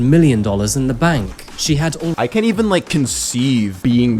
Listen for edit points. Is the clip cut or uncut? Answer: cut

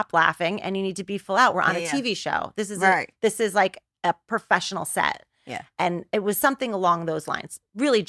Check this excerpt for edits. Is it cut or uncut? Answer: uncut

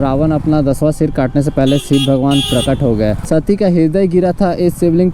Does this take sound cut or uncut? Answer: cut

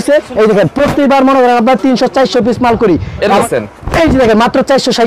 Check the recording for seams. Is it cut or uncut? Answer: cut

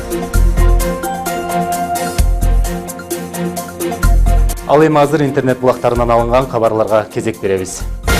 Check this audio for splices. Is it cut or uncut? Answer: cut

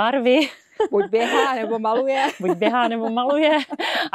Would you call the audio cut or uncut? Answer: uncut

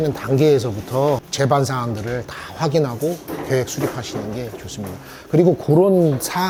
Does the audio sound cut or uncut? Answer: uncut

